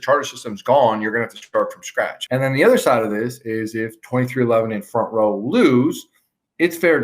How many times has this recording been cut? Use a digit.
1